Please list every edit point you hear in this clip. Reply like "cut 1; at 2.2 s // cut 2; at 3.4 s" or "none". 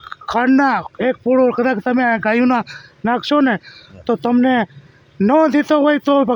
none